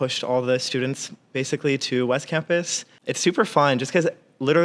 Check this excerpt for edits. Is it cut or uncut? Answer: cut